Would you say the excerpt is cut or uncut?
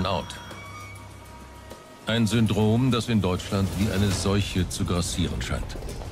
uncut